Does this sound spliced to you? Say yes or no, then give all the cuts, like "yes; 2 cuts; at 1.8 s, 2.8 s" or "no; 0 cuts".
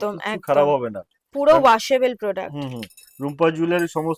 no; 0 cuts